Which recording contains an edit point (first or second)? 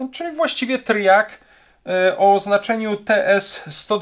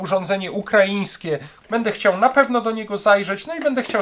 second